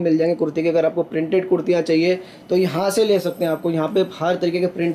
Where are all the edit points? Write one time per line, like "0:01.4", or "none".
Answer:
none